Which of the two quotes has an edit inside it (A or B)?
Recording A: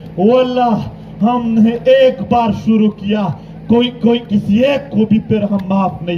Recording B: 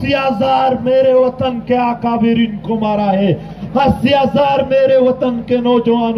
B